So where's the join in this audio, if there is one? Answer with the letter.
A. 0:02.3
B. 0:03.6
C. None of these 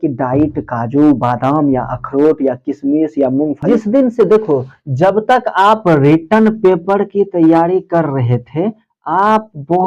B